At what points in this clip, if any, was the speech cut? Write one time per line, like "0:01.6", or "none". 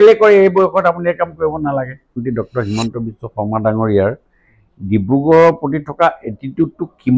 0:02.2